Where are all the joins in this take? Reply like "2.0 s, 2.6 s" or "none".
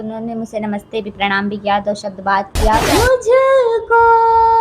2.9 s